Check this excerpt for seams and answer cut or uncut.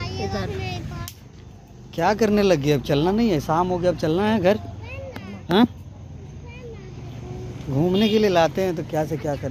cut